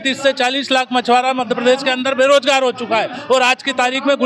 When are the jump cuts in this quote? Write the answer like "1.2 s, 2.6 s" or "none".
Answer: none